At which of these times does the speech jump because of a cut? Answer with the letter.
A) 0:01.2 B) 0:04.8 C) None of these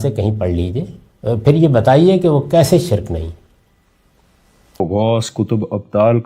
B